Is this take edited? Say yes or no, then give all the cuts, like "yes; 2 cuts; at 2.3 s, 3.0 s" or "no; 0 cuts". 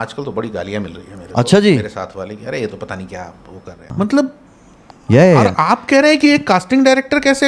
yes; 1 cut; at 3.9 s